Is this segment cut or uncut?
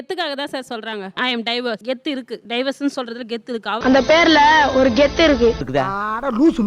cut